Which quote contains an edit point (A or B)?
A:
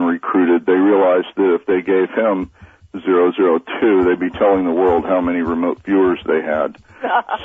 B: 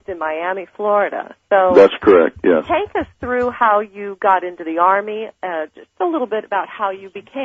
B